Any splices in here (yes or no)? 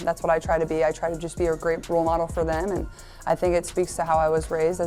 no